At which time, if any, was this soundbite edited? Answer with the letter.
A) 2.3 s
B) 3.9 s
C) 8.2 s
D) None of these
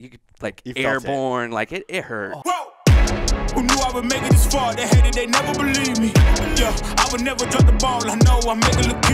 A